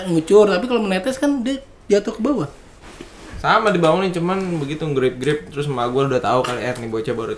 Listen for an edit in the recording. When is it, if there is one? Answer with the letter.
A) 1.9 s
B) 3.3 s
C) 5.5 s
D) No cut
B